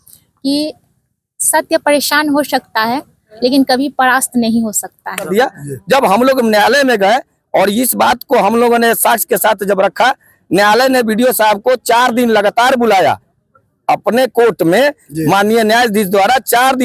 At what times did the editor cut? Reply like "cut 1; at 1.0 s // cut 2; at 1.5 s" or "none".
cut 1; at 5.3 s

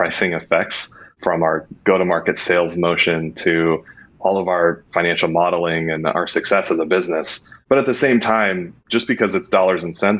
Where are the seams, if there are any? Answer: none

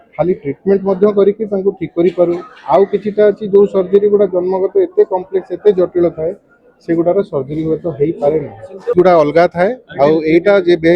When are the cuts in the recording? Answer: cut 1; at 8.9 s

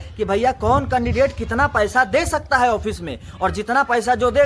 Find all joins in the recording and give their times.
none

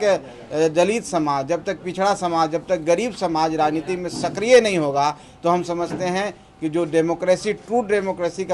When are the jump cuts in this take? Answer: none

